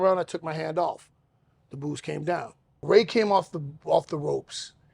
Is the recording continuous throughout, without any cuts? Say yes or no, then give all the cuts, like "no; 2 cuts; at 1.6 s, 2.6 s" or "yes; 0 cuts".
no; 1 cut; at 2.8 s